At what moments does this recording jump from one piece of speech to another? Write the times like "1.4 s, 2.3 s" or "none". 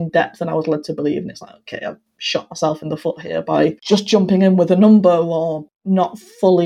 3.8 s, 5.7 s